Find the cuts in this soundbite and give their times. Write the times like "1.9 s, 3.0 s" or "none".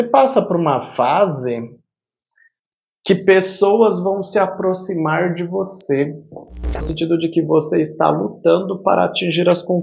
6.9 s